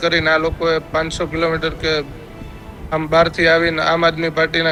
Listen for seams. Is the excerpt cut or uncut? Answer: uncut